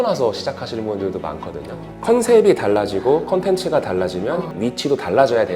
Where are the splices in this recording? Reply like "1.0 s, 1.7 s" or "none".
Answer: 1.9 s, 4.5 s